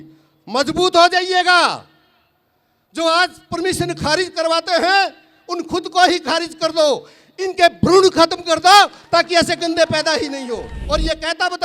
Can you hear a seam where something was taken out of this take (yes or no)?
yes